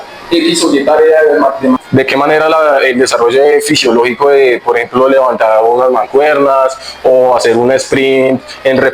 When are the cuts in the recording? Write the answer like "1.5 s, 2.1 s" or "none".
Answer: 1.8 s